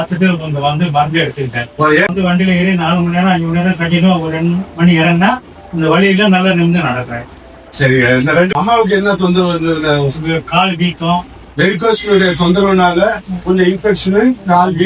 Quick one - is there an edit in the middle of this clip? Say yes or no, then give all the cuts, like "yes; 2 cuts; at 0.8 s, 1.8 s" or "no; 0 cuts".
yes; 2 cuts; at 2.1 s, 8.5 s